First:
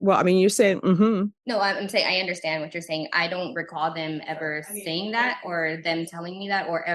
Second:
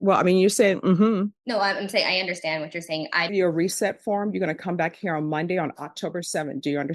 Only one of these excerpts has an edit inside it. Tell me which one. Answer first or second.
second